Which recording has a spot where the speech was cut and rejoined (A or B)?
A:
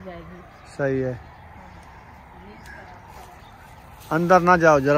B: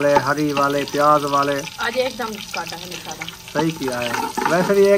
B